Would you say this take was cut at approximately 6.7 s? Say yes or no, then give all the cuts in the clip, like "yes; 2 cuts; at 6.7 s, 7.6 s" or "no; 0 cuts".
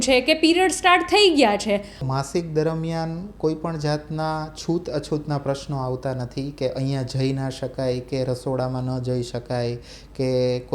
no; 1 cut; at 2.1 s